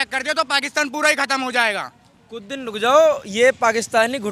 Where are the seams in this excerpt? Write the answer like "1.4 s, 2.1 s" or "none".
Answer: none